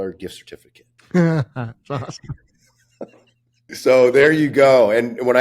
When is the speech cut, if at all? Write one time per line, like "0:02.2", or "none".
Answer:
0:03.7